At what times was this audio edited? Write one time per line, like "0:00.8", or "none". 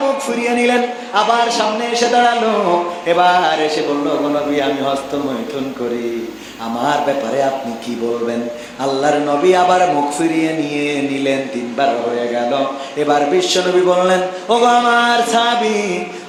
none